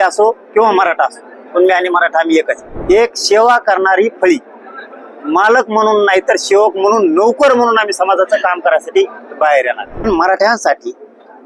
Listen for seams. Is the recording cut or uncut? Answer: cut